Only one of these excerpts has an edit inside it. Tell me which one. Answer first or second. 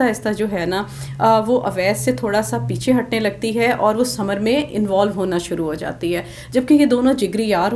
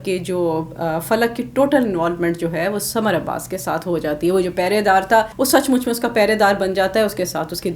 second